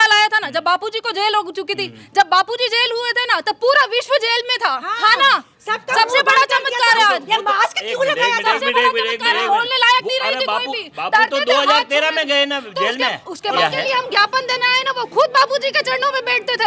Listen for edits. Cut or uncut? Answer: cut